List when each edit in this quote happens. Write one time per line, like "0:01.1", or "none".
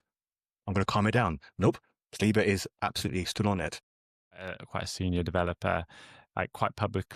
0:04.3